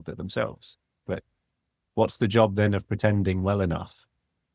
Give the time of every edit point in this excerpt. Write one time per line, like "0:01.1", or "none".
0:00.9